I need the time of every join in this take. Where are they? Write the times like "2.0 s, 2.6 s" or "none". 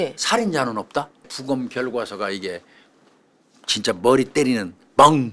1.3 s

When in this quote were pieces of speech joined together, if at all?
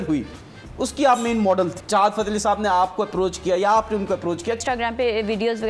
1.8 s, 4.6 s

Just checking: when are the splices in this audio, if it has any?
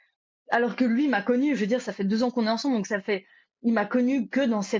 none

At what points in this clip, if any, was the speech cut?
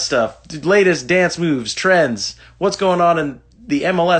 none

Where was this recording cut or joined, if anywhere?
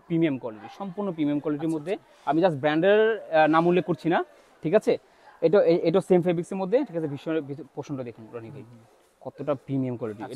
none

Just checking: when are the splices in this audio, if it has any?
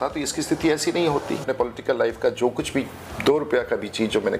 1.5 s

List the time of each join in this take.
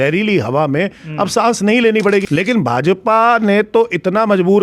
2.3 s

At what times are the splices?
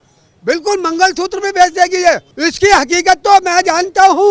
2.3 s

